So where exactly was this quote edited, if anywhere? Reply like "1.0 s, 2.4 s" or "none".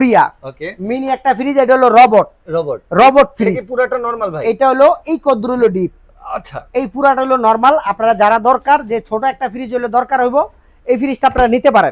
none